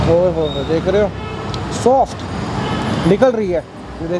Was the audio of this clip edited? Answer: no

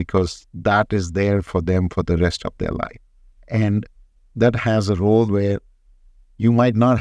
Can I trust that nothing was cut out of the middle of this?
yes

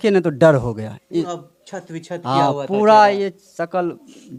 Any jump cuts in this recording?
no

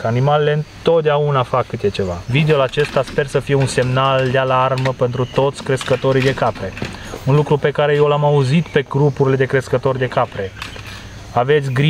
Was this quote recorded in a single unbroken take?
no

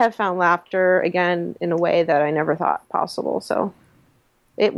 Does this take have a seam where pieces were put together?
no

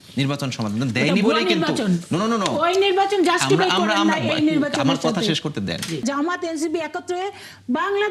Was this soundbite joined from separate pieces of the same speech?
yes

